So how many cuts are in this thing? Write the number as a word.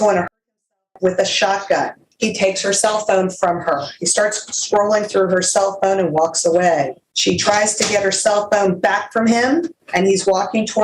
three